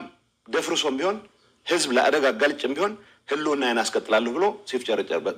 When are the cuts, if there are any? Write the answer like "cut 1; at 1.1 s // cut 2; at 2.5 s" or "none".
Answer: cut 1; at 4.4 s